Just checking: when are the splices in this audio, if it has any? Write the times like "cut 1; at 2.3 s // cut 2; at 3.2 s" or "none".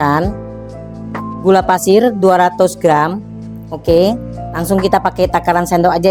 none